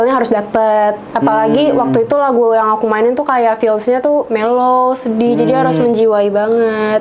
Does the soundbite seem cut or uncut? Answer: uncut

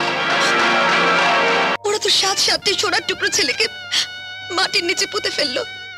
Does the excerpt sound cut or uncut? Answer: cut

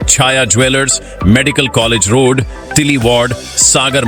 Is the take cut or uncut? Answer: uncut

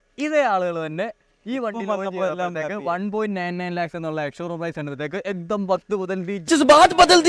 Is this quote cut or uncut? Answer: uncut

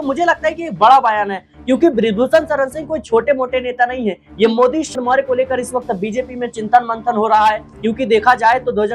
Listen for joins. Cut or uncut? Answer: cut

